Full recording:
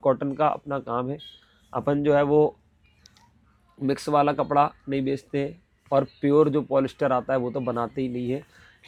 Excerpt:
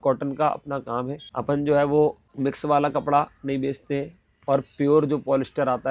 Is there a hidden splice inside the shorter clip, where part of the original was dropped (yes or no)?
yes